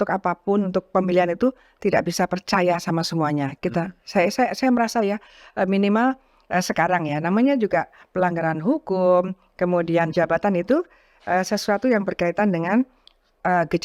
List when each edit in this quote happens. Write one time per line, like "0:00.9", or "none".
none